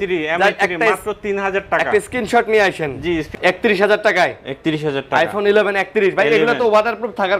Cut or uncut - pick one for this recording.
cut